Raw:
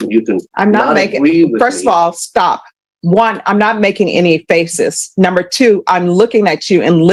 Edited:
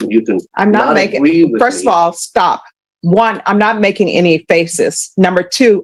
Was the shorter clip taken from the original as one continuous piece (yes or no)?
yes